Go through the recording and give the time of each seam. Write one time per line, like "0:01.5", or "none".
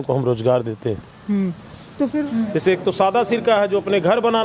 0:02.3